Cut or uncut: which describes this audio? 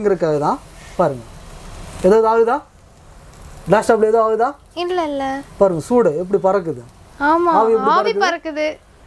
uncut